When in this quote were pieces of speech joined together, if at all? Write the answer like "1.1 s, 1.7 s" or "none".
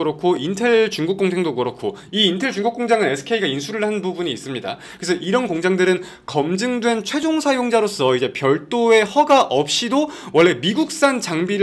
none